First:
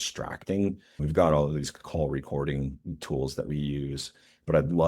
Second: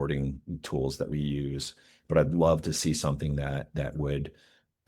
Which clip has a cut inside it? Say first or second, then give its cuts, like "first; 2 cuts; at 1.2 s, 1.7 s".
first; 1 cut; at 0.9 s